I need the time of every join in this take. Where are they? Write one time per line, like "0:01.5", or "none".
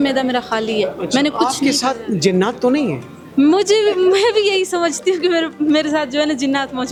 none